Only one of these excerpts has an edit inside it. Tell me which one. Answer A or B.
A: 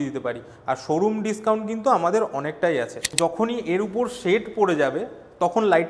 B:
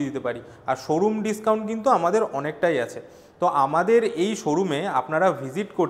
A